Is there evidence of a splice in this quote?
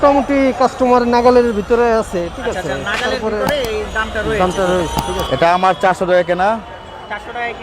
yes; 1 cut; at 5.1 s

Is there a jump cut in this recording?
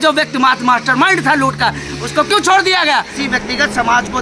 yes; 1 cut; at 3.1 s

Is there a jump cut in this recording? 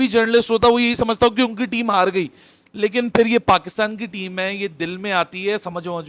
no; 0 cuts

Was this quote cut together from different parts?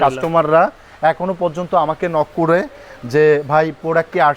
no; 0 cuts

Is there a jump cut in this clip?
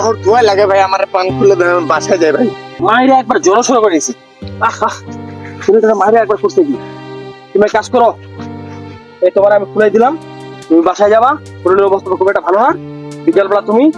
yes; 1 cut; at 2.7 s

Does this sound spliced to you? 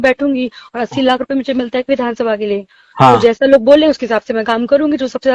no; 0 cuts

